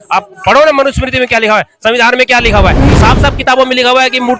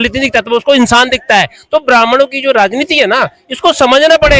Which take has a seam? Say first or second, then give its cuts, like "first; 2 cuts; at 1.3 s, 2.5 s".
first; 1 cut; at 2.9 s